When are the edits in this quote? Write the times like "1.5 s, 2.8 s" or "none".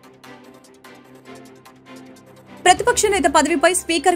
1.0 s